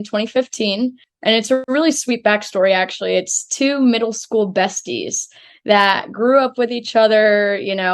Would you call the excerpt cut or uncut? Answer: cut